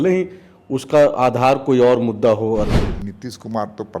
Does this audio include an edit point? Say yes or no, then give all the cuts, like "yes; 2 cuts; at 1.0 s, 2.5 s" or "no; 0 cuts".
yes; 1 cut; at 2.8 s